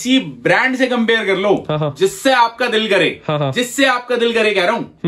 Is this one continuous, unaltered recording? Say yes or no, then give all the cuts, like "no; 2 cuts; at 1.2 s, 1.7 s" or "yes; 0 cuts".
yes; 0 cuts